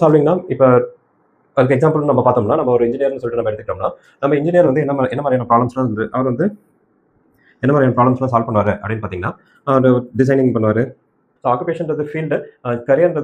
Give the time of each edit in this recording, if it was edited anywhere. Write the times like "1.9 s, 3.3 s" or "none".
11.2 s

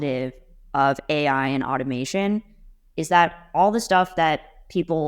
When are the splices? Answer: none

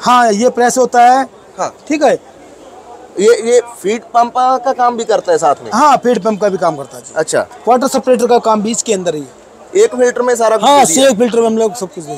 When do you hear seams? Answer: 7.5 s

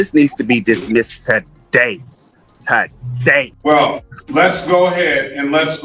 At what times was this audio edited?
3.3 s

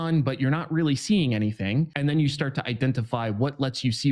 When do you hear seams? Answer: 1.9 s

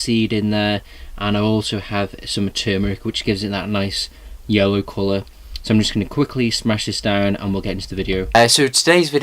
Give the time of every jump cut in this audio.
7.2 s

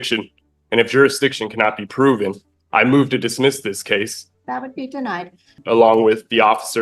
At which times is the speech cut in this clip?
4.2 s, 5.6 s

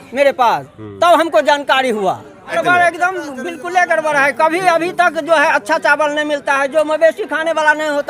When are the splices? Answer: 2.5 s

